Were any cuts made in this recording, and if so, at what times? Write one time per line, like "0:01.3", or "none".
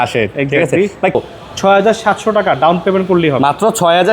0:01.1